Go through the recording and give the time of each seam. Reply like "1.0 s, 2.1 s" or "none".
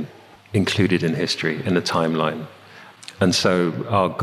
none